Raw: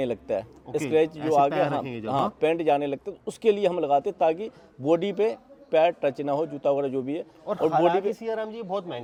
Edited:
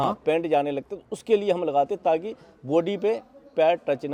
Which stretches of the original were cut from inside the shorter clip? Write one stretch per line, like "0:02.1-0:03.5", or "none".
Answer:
none